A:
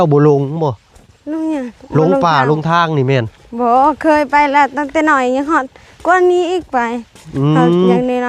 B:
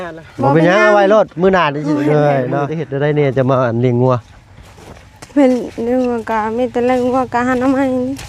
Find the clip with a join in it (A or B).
B